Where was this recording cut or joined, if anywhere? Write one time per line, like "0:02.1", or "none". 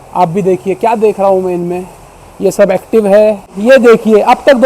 0:03.5

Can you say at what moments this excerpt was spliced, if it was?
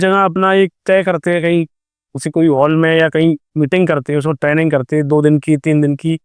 none

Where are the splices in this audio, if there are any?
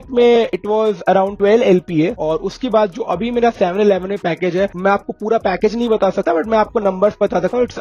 0:02.1

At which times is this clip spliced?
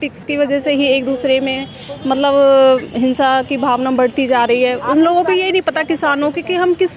none

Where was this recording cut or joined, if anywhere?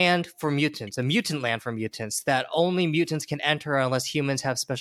none

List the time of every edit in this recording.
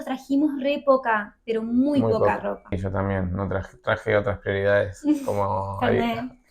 0:02.7

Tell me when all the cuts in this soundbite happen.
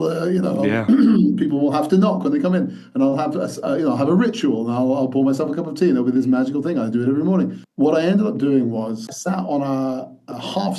0:07.6
0:09.1

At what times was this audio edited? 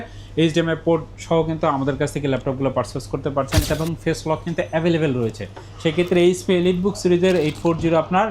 0:03.7

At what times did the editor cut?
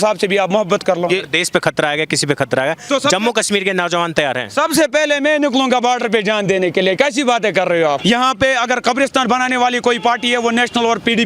0:01.1
0:08.0

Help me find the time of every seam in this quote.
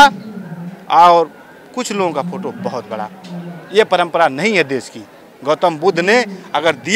none

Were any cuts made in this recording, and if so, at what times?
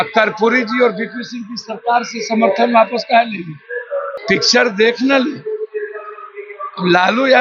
0:04.1

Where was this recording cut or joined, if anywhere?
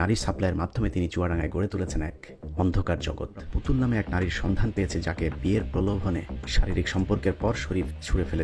0:03.5

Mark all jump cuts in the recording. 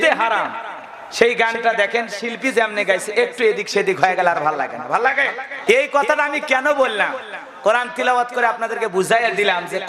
0:05.5

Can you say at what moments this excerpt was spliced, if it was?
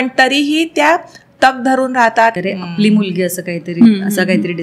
0:02.4

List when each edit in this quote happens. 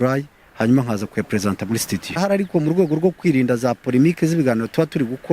0:02.2

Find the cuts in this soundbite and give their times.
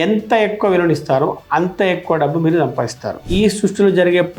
0:03.2

